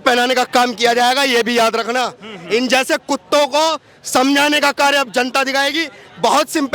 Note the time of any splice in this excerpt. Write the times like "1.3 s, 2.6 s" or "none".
none